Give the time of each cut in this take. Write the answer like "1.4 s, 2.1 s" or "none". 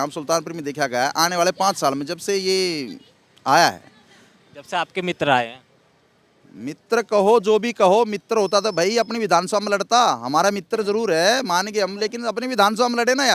none